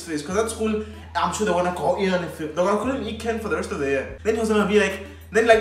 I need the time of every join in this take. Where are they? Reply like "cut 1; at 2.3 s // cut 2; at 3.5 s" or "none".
cut 1; at 4.1 s